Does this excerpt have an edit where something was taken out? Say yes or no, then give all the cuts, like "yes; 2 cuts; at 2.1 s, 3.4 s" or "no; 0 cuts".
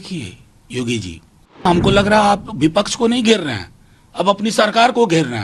yes; 1 cut; at 1.6 s